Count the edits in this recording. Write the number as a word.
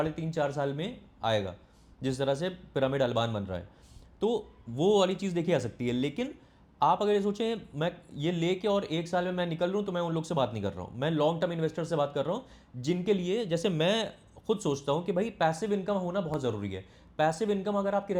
zero